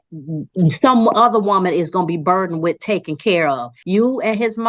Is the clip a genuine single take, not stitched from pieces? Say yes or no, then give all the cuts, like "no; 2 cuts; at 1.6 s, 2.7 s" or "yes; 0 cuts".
no; 1 cut; at 3.7 s